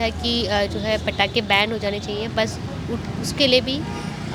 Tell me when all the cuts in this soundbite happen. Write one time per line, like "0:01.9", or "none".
none